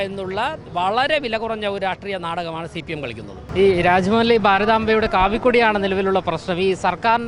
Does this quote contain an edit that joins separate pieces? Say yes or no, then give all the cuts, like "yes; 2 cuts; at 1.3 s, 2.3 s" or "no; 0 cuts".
no; 0 cuts